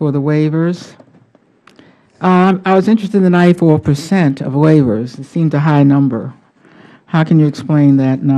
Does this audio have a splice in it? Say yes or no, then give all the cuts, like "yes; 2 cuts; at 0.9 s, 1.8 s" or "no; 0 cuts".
yes; 1 cut; at 1.3 s